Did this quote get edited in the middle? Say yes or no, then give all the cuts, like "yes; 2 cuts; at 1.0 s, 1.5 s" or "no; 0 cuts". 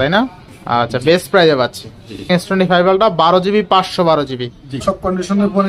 yes; 2 cuts; at 2.3 s, 4.8 s